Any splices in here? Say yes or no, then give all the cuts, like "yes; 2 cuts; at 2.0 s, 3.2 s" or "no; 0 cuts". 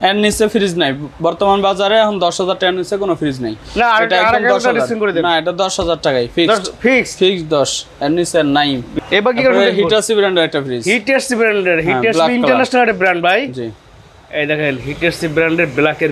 no; 0 cuts